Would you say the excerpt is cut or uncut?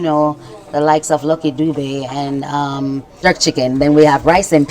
cut